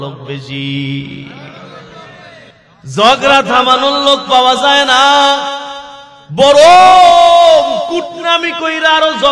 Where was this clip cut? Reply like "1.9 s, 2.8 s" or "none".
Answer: 2.5 s